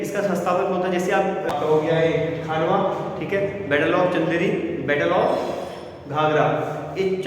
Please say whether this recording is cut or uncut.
cut